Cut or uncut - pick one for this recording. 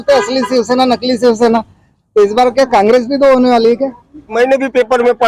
cut